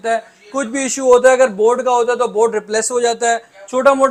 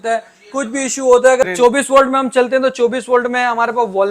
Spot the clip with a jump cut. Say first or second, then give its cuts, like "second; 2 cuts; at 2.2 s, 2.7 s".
second; 1 cut; at 1.4 s